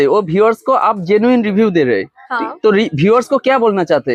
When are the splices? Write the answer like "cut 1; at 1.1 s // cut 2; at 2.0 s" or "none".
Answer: none